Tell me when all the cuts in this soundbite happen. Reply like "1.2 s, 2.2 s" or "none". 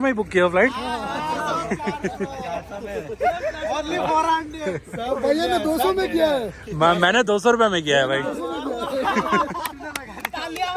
none